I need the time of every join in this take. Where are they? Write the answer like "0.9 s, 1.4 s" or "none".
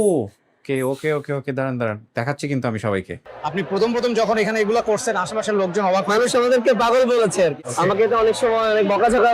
3.2 s, 7.6 s